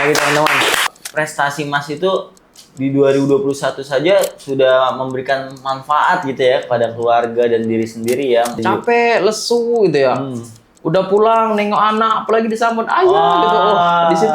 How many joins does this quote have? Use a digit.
2